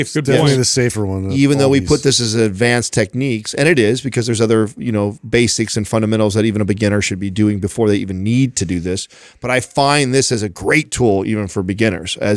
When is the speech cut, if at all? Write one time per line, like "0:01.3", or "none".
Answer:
none